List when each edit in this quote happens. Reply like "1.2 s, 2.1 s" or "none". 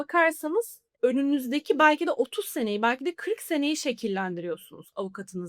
none